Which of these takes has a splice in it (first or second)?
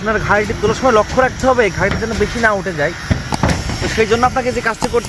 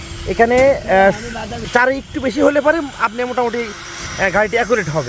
second